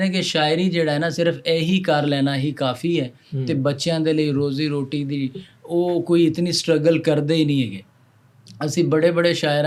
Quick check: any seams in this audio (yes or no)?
no